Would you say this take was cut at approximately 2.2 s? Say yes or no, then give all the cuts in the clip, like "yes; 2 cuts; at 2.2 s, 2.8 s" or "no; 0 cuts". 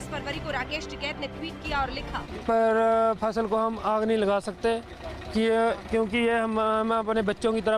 yes; 1 cut; at 2.2 s